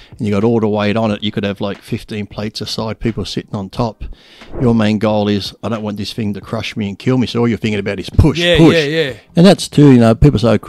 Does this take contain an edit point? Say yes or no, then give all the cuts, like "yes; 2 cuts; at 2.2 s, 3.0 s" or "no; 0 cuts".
yes; 1 cut; at 9.2 s